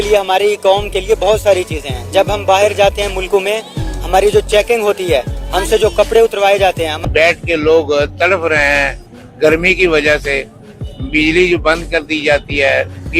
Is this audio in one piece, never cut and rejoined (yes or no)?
yes